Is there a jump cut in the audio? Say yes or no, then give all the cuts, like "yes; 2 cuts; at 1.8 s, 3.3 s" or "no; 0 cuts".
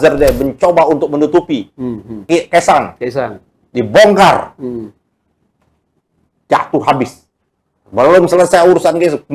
yes; 1 cut; at 2.1 s